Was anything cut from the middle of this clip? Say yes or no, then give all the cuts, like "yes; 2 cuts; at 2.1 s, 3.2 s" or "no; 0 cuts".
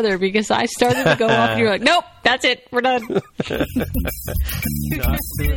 no; 0 cuts